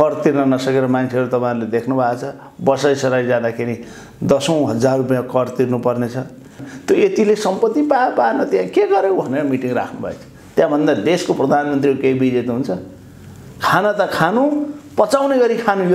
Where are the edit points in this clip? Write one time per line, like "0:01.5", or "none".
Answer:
0:06.6